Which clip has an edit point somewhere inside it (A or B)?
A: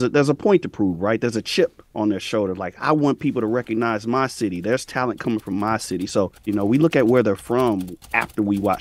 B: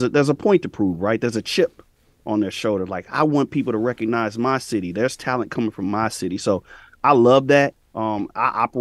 A